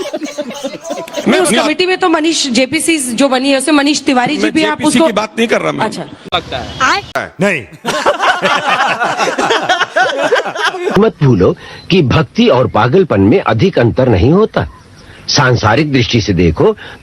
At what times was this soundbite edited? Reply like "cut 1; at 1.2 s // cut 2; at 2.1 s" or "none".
cut 1; at 1.4 s // cut 2; at 10.9 s